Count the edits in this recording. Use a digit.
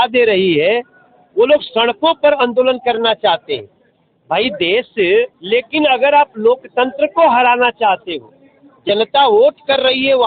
1